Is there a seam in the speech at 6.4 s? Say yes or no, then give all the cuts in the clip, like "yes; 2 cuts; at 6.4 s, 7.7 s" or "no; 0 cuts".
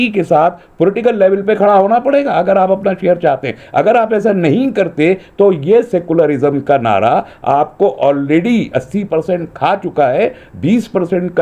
no; 0 cuts